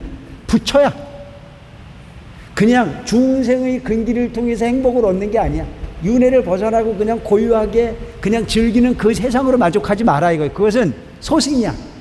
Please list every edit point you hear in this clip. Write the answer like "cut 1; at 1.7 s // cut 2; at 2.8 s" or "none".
none